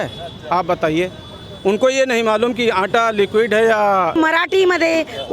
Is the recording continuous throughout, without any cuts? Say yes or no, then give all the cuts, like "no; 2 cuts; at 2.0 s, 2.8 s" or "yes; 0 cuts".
no; 1 cut; at 4.1 s